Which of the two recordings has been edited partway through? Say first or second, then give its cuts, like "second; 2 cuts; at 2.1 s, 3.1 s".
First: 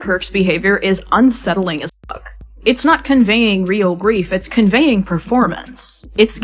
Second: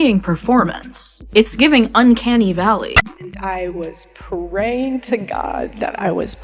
second; 1 cut; at 2.9 s